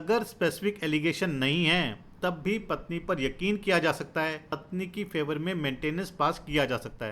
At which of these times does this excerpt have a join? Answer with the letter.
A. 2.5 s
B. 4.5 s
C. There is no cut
B